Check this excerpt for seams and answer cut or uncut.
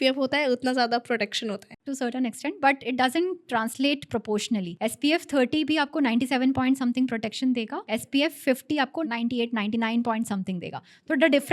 cut